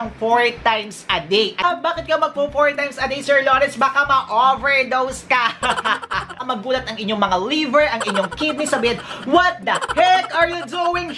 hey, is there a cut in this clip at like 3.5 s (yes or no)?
no